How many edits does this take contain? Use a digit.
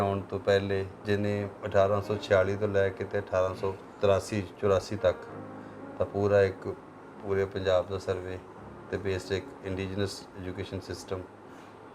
2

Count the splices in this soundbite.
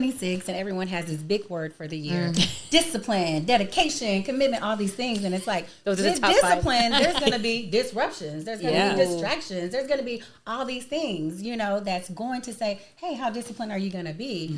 0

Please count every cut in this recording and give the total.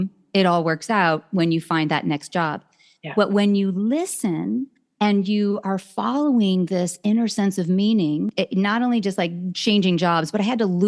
1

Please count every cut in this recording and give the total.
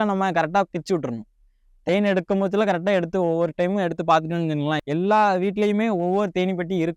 1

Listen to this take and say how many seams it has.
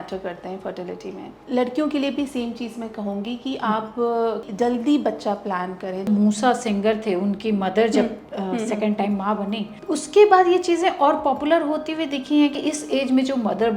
5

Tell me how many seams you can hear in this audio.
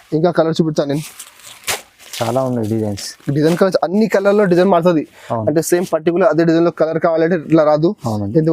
0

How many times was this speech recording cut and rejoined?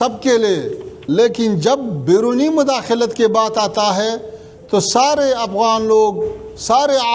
1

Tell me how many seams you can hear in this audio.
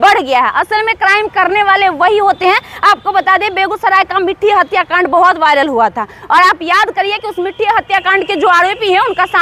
0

